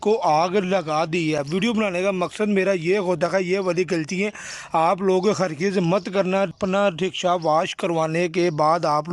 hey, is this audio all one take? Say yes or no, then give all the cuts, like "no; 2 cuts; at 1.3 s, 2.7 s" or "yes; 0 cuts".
yes; 0 cuts